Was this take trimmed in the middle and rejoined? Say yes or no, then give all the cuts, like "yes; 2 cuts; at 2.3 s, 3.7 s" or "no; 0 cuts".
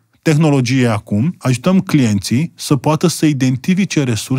yes; 1 cut; at 1.4 s